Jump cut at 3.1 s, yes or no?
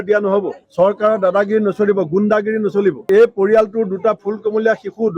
yes